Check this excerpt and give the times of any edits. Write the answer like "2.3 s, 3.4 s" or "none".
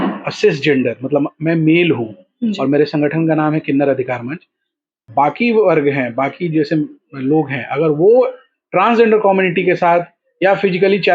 4.9 s